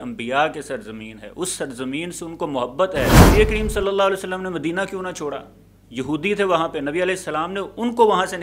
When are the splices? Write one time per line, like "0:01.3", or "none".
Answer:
0:03.1